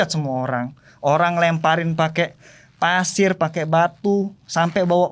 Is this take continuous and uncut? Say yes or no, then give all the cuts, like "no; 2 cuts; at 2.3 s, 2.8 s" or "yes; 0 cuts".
yes; 0 cuts